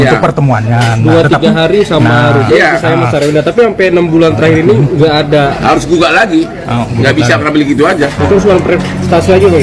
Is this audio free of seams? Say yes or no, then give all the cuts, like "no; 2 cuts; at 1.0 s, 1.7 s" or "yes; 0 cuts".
yes; 0 cuts